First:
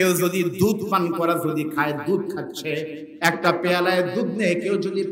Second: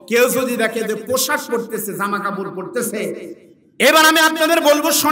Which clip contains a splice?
second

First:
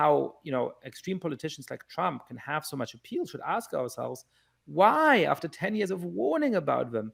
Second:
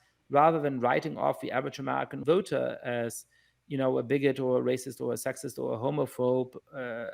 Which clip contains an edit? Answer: second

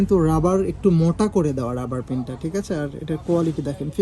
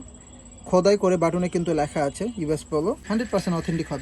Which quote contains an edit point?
second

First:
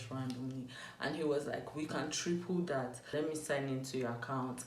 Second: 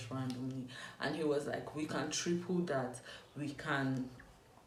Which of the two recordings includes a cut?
first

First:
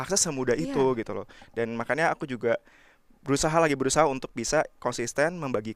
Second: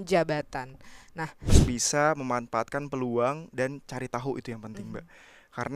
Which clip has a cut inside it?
second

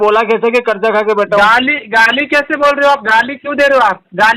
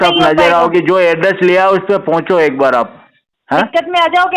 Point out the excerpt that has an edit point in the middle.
second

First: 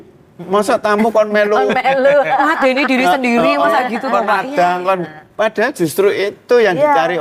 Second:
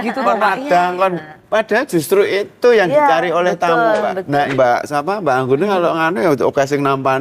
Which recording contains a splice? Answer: second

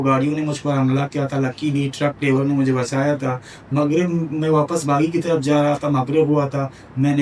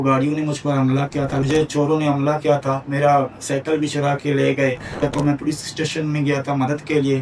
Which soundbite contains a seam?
second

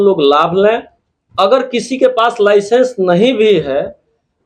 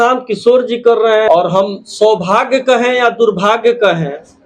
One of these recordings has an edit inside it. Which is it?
second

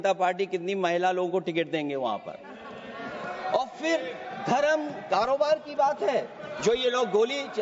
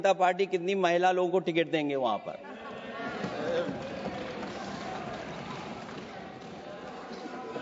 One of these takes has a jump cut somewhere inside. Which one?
first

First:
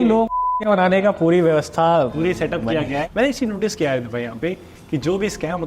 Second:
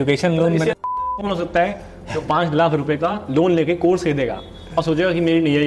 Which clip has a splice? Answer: first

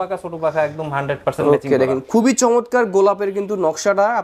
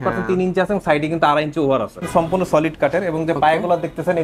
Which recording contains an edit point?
second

